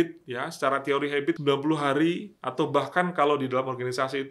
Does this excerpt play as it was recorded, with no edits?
no; 1 cut; at 1.4 s

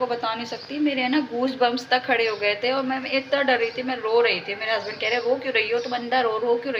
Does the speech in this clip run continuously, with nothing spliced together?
yes; 0 cuts

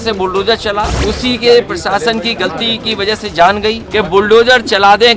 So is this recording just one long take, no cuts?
no; 2 cuts; at 0.9 s, 3.8 s

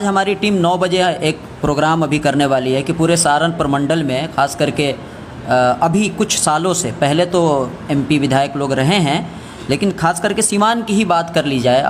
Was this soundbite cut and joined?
no; 0 cuts

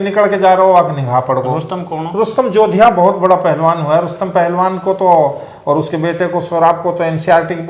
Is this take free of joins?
yes; 0 cuts

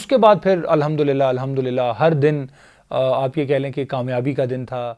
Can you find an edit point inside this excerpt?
no; 0 cuts

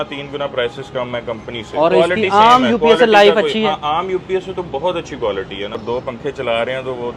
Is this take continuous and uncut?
no; 2 cuts; at 1.9 s, 5.8 s

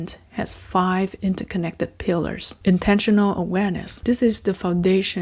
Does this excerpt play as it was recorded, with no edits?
no; 2 cuts; at 2.5 s, 3.9 s

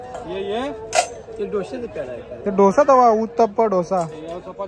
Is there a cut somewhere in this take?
no; 0 cuts

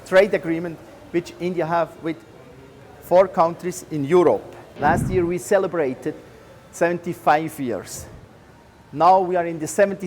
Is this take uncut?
no; 1 cut; at 4.7 s

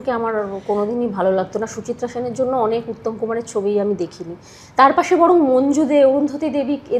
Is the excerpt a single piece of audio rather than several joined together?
yes; 0 cuts

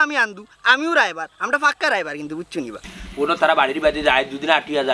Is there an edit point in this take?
yes; 1 cut; at 2.8 s

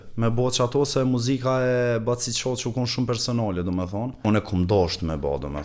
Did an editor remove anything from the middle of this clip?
yes; 1 cut; at 4.2 s

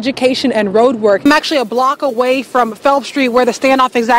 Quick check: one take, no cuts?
no; 1 cut; at 1.2 s

